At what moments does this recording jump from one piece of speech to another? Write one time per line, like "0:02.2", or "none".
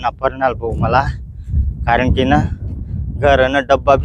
none